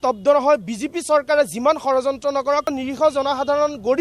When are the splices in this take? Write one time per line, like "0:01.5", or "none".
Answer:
0:02.8